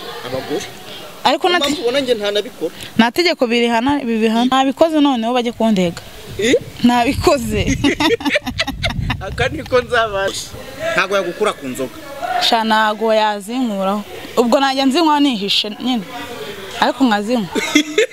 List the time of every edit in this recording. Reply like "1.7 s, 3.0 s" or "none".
4.5 s, 10.4 s